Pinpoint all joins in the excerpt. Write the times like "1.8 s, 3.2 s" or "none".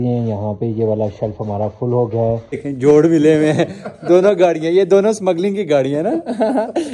2.6 s